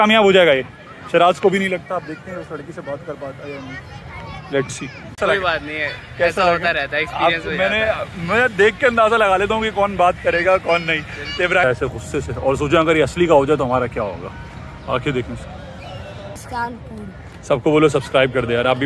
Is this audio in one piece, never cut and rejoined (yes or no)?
no